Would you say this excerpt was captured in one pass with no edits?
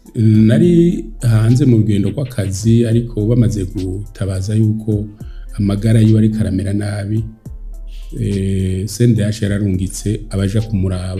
yes; 0 cuts

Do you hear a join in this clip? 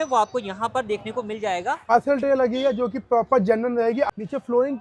yes; 2 cuts; at 1.9 s, 4.1 s

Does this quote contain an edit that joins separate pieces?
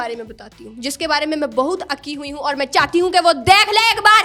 no; 0 cuts

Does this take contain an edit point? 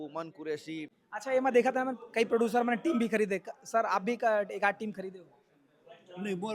yes; 1 cut; at 1.0 s

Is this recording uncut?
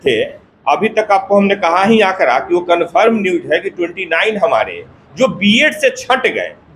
yes; 0 cuts

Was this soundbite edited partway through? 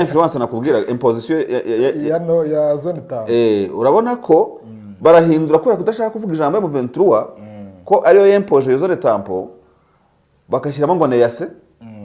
no; 0 cuts

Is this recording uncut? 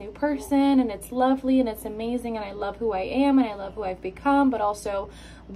yes; 0 cuts

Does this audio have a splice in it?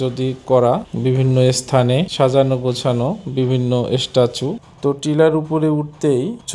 yes; 1 cut; at 4.6 s

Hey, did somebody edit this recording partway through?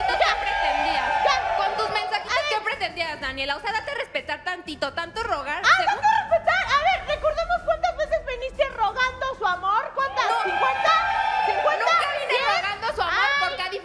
yes; 1 cut; at 4.6 s

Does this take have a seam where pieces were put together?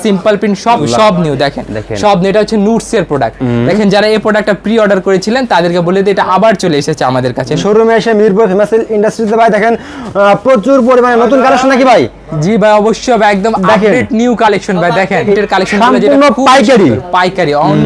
yes; 3 cuts; at 0.8 s, 7.6 s, 15.4 s

